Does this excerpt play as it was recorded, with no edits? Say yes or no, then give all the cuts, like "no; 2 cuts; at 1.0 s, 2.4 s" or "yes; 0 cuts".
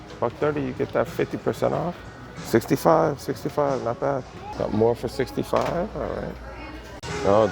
no; 2 cuts; at 4.4 s, 6.4 s